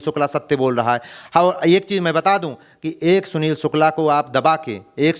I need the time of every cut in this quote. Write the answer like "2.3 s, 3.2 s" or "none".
none